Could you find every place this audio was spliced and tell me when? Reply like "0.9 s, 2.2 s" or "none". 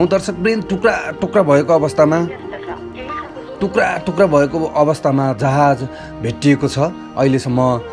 none